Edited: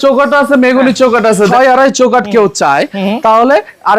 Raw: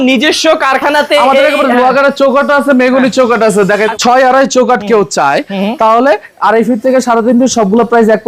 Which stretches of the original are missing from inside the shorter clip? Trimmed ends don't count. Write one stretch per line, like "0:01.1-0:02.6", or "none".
0:03.7-0:04.1